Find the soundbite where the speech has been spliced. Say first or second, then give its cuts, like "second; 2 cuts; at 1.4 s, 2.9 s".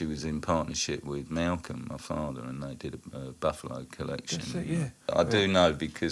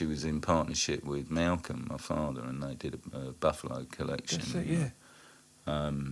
first; 1 cut; at 5.0 s